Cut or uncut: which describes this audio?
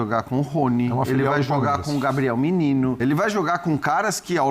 cut